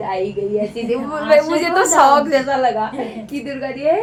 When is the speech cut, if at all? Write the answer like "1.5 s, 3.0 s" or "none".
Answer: none